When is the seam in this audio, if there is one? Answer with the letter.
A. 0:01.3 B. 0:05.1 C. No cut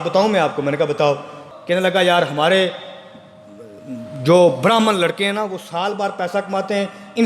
A